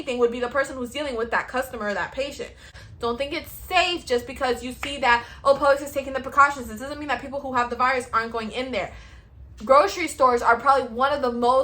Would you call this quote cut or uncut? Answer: cut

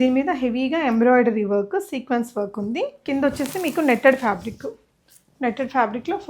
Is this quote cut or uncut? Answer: cut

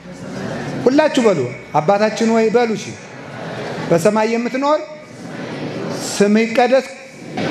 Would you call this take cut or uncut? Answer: uncut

